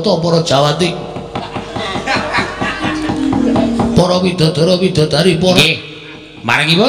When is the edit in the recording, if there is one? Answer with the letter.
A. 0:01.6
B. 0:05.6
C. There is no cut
B